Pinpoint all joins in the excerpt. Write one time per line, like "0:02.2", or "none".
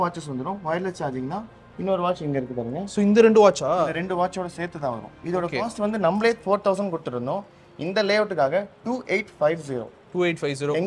none